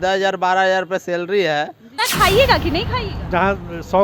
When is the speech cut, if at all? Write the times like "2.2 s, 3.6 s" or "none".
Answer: 2.0 s, 3.2 s